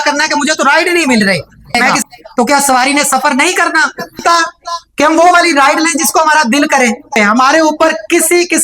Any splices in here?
yes; 3 cuts; at 1.7 s, 4.2 s, 7.2 s

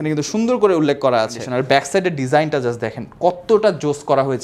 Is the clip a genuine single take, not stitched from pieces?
no; 1 cut; at 1.4 s

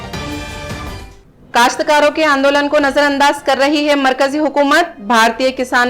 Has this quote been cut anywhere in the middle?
no; 0 cuts

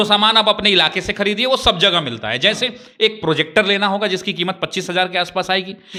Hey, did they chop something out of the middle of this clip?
no; 0 cuts

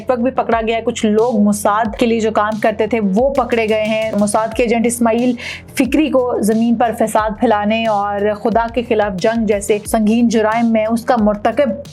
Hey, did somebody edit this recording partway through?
yes; 3 cuts; at 1.9 s, 4.1 s, 9.9 s

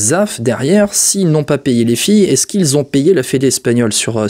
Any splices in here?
no; 0 cuts

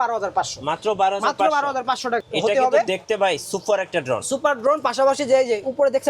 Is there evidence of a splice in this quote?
yes; 1 cut; at 2.3 s

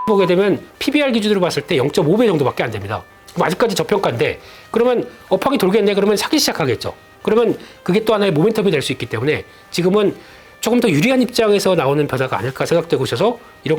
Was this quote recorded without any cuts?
yes; 0 cuts

